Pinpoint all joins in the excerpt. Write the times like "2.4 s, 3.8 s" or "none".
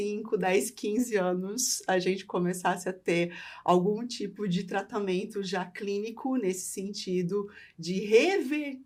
none